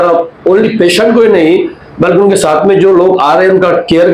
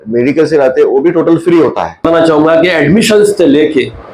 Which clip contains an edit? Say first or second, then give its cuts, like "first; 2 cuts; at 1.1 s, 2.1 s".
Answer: second; 1 cut; at 2.1 s